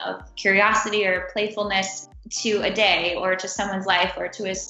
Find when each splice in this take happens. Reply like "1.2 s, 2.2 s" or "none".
none